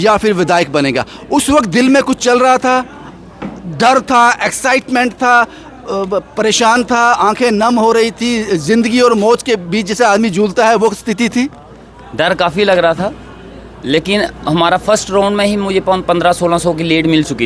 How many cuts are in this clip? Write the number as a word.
zero